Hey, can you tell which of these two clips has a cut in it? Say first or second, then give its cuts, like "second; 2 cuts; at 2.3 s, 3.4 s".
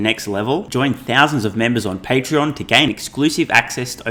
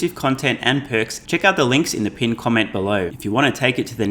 second; 2 cuts; at 1.2 s, 3.1 s